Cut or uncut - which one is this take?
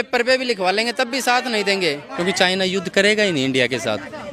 cut